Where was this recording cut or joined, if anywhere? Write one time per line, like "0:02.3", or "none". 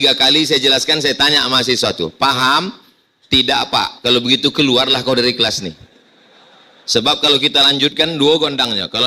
none